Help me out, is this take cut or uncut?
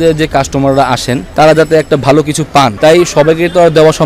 cut